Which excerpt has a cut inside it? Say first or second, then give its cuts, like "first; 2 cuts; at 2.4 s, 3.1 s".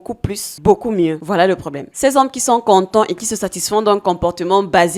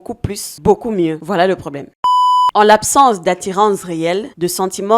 second; 1 cut; at 2.0 s